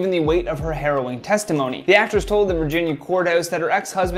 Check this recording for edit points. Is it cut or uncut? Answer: cut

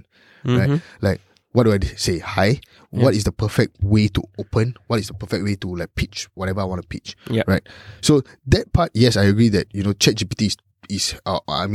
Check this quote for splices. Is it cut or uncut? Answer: uncut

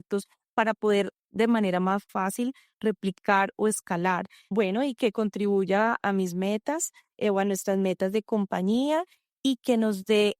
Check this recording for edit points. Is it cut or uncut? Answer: cut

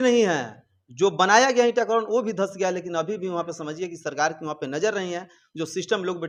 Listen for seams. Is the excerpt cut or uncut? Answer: uncut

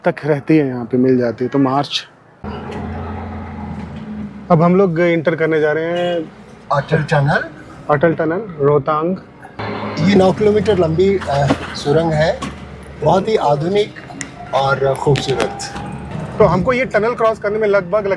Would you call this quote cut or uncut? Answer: cut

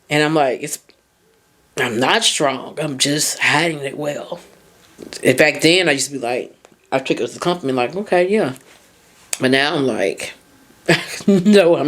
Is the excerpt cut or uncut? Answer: cut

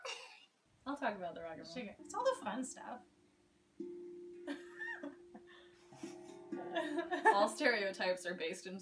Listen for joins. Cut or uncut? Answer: cut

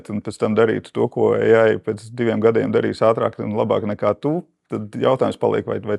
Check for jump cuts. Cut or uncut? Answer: uncut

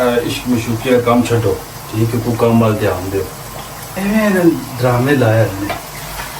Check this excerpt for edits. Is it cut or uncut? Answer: cut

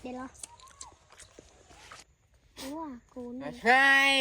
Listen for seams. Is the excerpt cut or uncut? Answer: cut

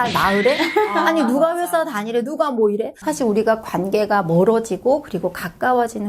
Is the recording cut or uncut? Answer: cut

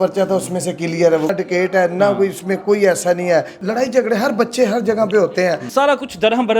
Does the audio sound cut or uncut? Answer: cut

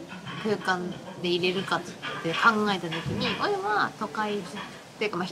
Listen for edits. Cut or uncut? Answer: uncut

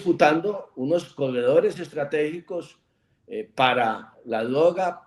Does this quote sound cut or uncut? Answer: uncut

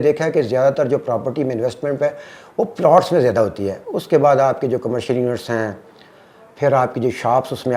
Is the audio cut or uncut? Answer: uncut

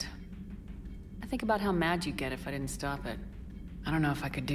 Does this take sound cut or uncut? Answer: uncut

